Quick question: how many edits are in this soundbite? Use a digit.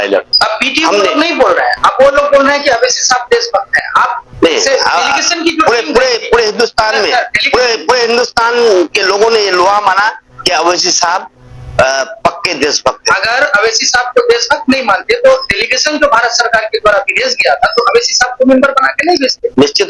0